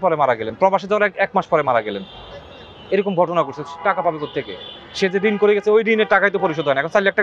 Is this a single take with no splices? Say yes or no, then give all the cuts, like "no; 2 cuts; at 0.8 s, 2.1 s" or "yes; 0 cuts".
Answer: yes; 0 cuts